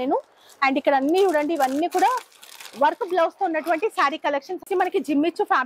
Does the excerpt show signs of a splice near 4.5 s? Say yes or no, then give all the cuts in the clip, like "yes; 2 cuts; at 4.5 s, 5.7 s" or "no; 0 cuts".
yes; 1 cut; at 4.5 s